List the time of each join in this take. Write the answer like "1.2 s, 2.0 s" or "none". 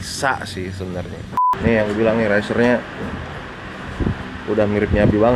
1.5 s